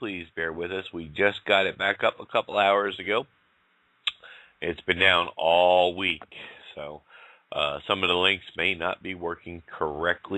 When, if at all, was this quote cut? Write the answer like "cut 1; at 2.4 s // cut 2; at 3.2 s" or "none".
cut 1; at 7.0 s